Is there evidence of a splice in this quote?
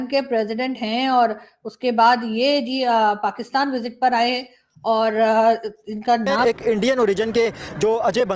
yes; 1 cut; at 6.4 s

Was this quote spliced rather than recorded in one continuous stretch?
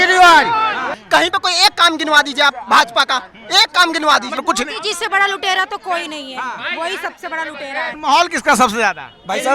yes; 3 cuts; at 1.0 s, 4.4 s, 7.9 s

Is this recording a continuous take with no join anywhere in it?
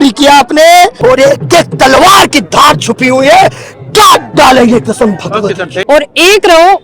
no; 2 cuts; at 1.0 s, 5.7 s

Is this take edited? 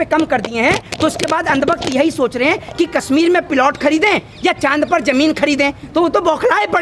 no; 0 cuts

